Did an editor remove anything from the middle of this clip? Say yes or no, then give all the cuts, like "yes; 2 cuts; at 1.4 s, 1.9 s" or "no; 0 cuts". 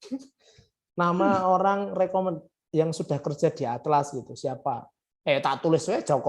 no; 0 cuts